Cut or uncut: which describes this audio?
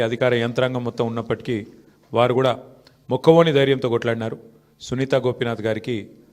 uncut